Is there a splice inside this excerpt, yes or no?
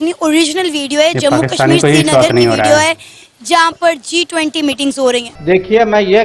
yes